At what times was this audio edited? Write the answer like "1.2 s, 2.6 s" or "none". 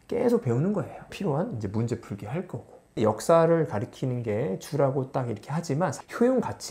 1.0 s, 2.8 s